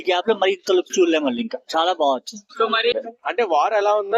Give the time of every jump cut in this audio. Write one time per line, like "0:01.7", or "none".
0:02.9